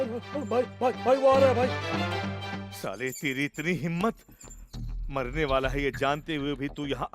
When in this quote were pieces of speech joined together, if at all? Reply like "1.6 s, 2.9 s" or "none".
1.8 s, 2.6 s